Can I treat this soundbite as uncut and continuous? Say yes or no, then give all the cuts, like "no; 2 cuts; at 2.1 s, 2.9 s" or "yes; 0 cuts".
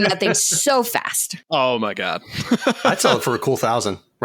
no; 1 cut; at 2.9 s